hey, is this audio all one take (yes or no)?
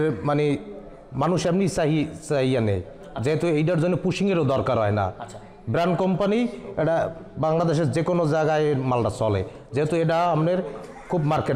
yes